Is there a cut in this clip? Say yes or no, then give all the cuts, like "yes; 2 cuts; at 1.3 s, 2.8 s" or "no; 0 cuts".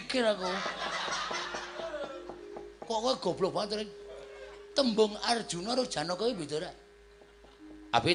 no; 0 cuts